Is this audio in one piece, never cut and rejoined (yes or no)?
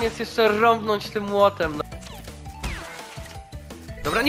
no